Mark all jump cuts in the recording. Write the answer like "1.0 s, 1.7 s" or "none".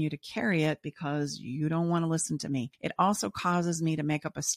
2.8 s